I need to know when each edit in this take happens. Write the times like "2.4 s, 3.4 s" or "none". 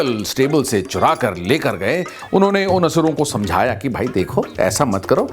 2.2 s